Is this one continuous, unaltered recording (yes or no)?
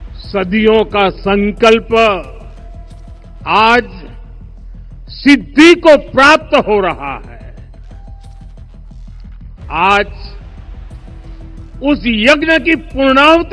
no